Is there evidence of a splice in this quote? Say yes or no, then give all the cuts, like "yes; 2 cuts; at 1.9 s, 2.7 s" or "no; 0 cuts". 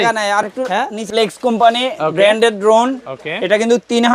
yes; 1 cut; at 1.0 s